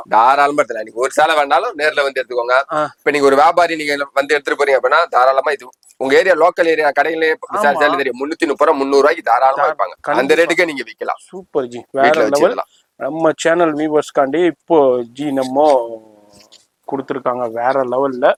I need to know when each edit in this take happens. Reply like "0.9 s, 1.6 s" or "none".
none